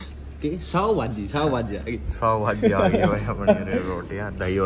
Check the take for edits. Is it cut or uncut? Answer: uncut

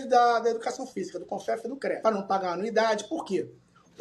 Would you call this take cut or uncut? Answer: cut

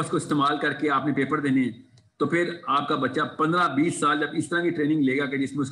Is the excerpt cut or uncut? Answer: uncut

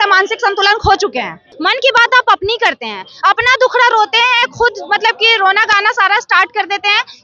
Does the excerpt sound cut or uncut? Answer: cut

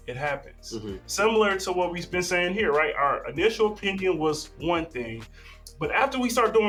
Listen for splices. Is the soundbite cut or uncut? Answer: uncut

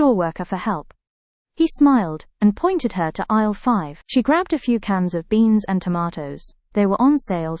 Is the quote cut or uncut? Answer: uncut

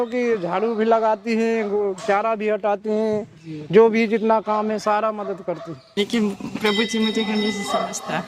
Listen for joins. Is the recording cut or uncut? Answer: cut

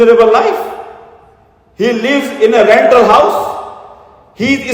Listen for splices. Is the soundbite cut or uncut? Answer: uncut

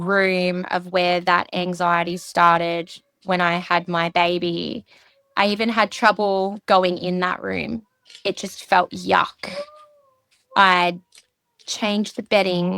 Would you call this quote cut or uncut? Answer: uncut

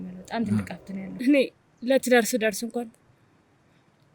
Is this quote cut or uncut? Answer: cut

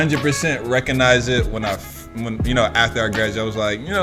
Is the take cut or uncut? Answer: uncut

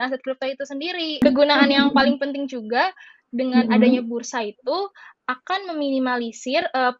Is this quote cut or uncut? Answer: cut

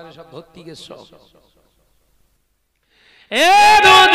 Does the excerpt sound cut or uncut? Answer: cut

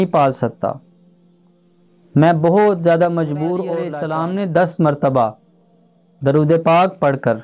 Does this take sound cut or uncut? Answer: cut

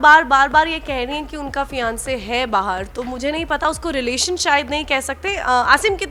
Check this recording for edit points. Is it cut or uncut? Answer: uncut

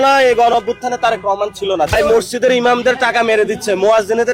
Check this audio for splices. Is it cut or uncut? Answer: cut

